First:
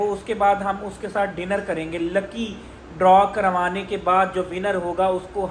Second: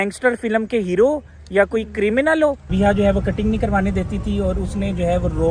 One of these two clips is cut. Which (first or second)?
second